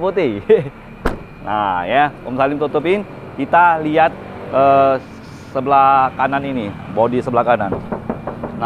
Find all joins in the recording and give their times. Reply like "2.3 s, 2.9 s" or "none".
none